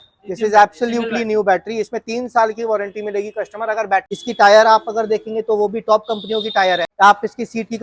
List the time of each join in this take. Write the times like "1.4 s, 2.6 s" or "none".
4.1 s, 6.9 s